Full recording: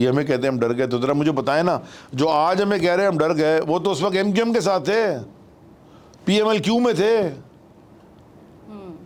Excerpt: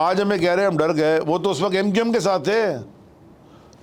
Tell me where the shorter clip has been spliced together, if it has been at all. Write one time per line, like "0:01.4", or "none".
none